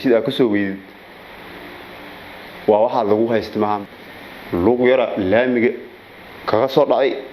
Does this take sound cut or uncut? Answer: cut